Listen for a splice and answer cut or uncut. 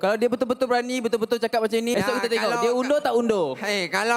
cut